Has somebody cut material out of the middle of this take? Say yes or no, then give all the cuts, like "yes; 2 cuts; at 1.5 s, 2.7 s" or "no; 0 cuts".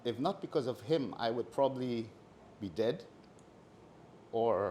no; 0 cuts